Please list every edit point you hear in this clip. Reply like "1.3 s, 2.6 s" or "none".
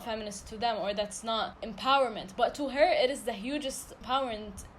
1.6 s, 3.9 s